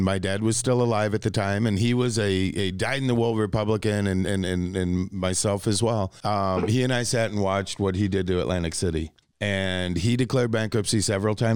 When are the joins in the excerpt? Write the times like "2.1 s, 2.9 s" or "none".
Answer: 6.2 s, 9.2 s